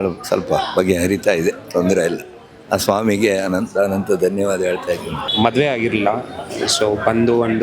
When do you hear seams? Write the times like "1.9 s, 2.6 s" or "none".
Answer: 5.2 s